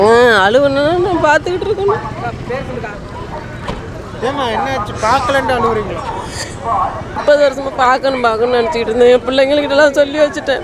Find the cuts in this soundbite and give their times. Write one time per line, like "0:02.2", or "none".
0:07.2